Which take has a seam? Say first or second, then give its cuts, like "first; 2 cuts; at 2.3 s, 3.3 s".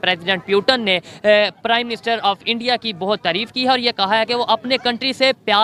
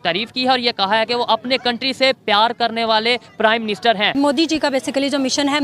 second; 1 cut; at 4.1 s